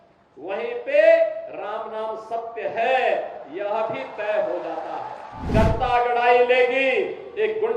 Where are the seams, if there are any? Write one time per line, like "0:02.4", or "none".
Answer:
0:05.5